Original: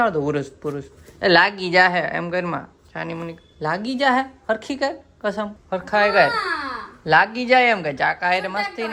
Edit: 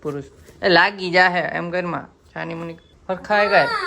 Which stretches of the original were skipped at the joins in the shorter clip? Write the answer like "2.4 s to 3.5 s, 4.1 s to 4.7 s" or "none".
3.5 s to 5.6 s